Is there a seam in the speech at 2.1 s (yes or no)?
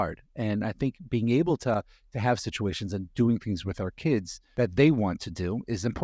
no